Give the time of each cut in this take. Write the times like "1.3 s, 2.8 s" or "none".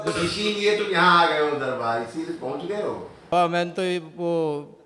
3.3 s